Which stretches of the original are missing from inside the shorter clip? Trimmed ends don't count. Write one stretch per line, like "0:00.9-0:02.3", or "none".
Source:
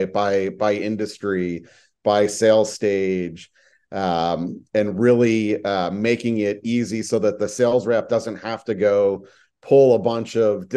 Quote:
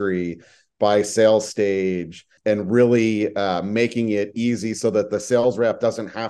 0:03.5-0:04.6